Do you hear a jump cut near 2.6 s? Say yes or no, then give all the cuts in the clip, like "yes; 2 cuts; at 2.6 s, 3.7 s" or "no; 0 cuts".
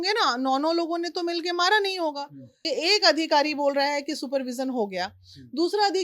yes; 1 cut; at 2.6 s